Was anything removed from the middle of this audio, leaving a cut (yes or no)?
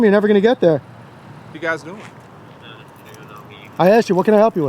yes